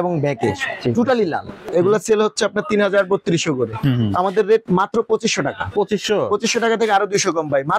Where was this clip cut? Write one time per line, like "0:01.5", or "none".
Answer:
0:01.6